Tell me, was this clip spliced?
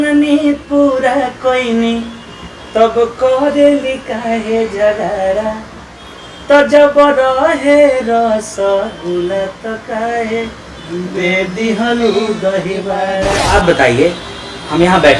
yes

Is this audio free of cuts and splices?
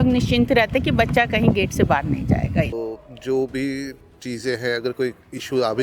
no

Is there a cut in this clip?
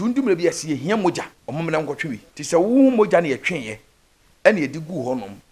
yes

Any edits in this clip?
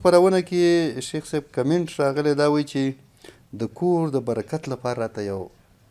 no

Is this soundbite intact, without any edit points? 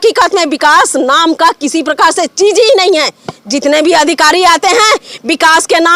yes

